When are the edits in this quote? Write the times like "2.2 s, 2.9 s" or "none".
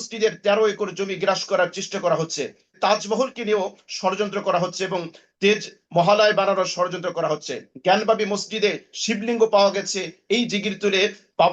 2.6 s